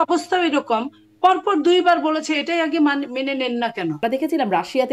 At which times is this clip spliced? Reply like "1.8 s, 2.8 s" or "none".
4.0 s